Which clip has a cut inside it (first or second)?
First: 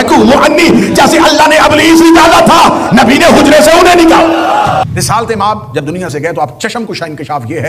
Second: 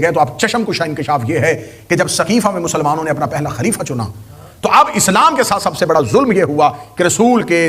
first